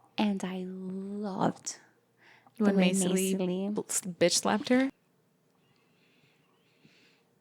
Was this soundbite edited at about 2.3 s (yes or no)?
no